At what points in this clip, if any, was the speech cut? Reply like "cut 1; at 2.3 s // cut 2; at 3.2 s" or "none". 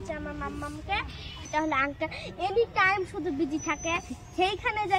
cut 1; at 1.5 s